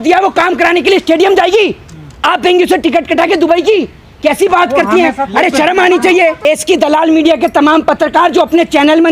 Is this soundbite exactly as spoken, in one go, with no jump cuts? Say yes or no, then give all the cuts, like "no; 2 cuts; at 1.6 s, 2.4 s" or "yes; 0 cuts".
no; 1 cut; at 6.5 s